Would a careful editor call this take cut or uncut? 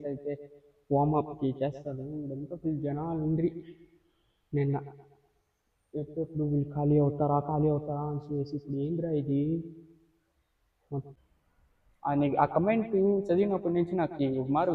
cut